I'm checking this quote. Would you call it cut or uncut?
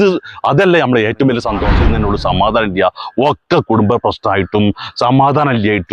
cut